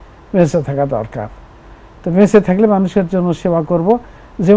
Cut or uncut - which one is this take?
uncut